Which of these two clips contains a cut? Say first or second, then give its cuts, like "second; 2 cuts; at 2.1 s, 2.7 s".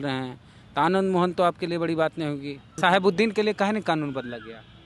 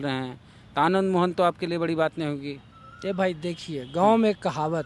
first; 1 cut; at 2.8 s